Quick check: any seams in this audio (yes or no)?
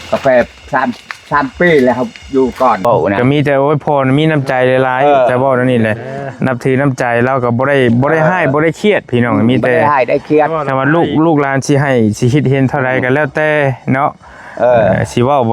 yes